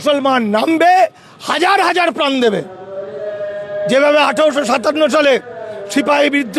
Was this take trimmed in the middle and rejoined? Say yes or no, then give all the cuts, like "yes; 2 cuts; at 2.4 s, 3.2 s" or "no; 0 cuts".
no; 0 cuts